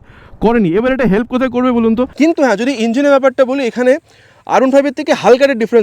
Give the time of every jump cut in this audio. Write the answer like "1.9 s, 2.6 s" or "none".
2.1 s